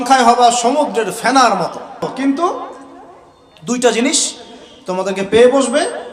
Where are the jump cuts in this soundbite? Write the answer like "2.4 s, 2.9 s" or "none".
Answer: 2.0 s